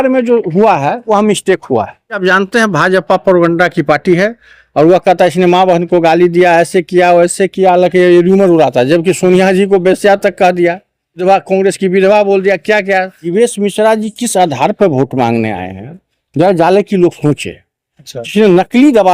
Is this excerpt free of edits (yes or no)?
no